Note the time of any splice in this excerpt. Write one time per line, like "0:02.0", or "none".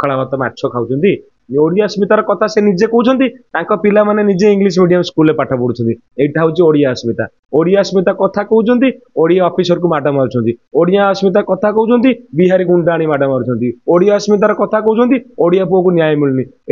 0:01.4